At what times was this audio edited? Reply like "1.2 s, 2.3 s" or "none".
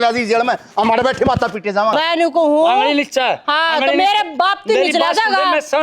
1.9 s